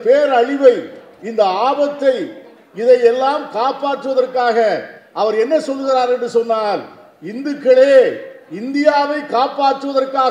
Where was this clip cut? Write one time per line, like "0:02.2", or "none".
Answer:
none